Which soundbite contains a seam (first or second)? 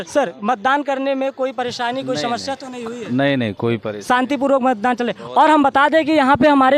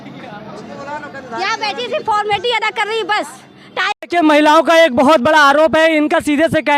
second